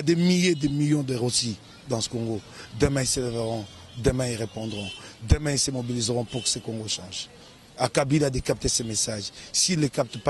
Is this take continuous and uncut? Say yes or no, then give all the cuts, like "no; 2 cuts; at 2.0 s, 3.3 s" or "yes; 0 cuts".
yes; 0 cuts